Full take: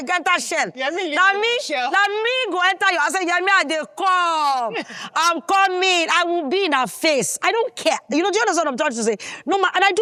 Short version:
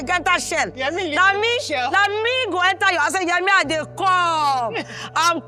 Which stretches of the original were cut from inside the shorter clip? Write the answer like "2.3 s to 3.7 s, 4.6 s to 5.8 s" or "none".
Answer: none